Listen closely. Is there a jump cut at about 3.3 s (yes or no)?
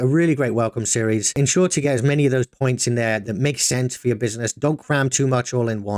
yes